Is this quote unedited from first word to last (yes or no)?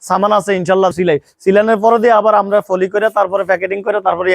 no